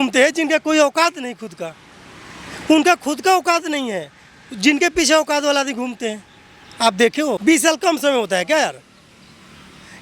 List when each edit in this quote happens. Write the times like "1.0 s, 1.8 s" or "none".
7.4 s